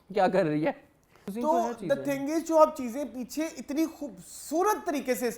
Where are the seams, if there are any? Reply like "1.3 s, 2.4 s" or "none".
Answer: 1.2 s